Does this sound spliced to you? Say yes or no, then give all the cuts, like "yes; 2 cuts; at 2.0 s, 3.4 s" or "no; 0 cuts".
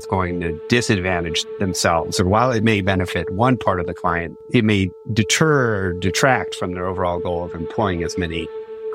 no; 0 cuts